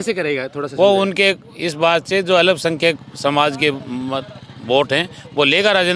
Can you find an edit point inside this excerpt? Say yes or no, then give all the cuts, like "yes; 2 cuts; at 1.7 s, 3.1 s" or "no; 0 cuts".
no; 0 cuts